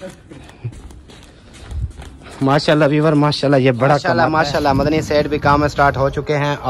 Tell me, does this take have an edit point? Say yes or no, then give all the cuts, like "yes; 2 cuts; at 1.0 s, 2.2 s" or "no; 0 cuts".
yes; 1 cut; at 4.1 s